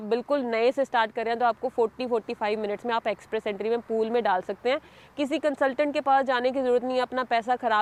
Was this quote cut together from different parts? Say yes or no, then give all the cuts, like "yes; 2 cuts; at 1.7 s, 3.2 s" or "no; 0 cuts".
no; 0 cuts